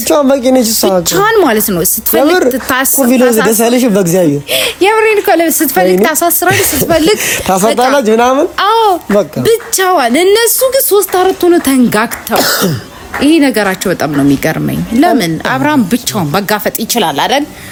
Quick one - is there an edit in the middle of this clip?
no; 0 cuts

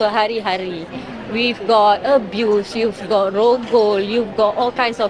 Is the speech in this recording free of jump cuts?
yes; 0 cuts

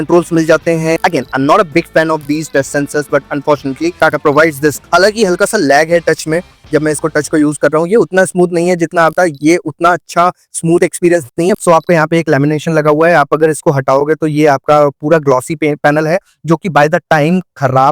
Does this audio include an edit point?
yes; 3 cuts; at 4.8 s, 9.1 s, 11.6 s

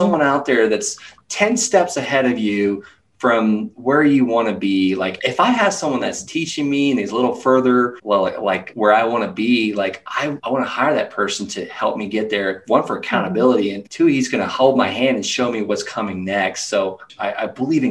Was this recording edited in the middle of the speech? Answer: yes; 2 cuts; at 5.2 s, 17.0 s

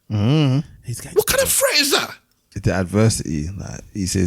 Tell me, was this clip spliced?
yes; 1 cut; at 2.4 s

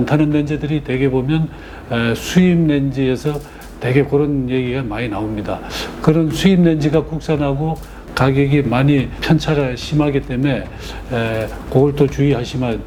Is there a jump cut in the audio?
no; 0 cuts

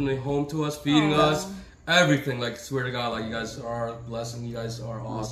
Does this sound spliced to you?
no; 0 cuts

